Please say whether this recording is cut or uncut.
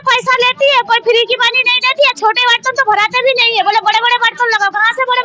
uncut